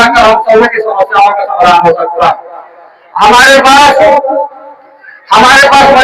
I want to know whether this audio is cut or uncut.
uncut